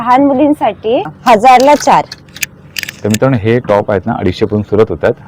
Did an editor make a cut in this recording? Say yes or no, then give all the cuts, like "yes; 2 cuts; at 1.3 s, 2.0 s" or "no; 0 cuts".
yes; 1 cut; at 1.1 s